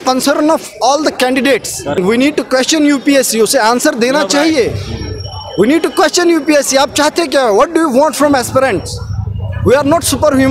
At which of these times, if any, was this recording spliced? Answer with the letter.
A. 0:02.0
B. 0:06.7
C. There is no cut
A